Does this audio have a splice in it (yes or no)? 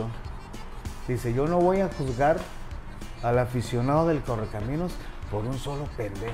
no